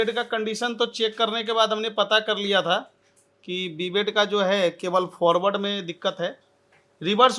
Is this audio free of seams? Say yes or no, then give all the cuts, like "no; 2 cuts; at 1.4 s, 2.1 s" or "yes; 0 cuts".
yes; 0 cuts